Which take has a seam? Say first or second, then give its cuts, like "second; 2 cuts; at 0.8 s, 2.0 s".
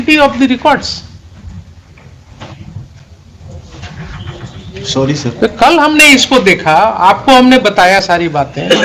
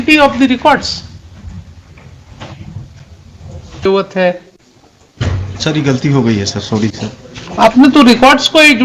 second; 1 cut; at 3.9 s